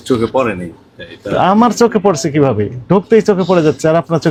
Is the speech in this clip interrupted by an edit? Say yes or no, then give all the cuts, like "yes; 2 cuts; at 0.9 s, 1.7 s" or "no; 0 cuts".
no; 0 cuts